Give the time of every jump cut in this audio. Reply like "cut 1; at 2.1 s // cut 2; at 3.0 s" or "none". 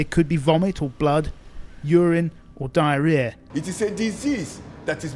cut 1; at 3.4 s